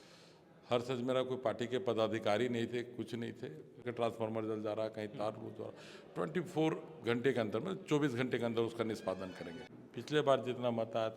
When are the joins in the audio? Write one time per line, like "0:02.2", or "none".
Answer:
0:03.8
0:09.6